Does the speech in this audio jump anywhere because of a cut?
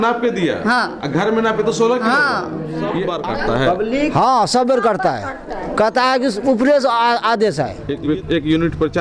yes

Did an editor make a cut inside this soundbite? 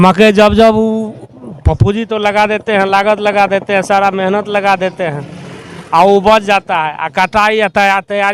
no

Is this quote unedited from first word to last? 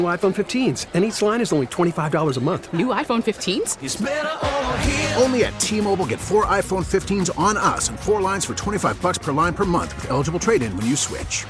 yes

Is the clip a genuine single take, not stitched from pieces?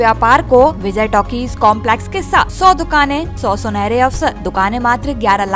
no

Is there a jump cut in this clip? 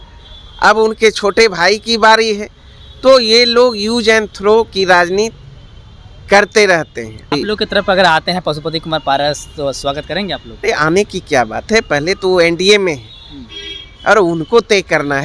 yes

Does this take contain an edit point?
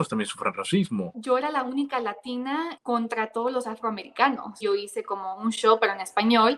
yes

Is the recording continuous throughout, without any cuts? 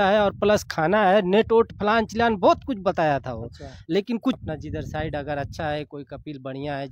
no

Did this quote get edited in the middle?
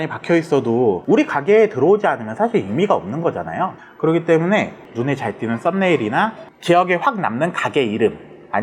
no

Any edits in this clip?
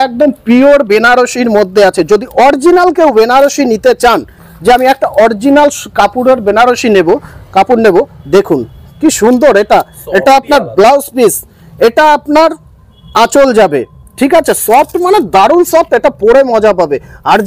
no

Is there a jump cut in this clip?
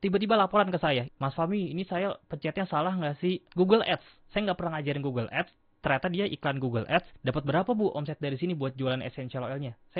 yes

